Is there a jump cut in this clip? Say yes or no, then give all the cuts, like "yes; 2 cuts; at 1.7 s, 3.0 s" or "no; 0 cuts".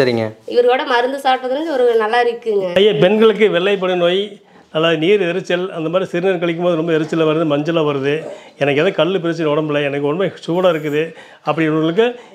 yes; 1 cut; at 2.7 s